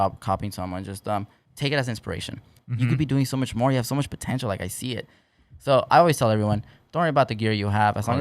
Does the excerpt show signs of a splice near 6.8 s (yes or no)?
no